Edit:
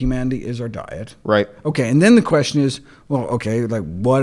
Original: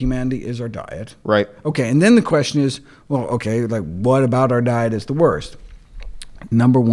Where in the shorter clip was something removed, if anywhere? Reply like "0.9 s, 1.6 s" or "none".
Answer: none